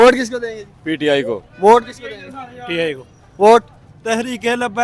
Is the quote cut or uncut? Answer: uncut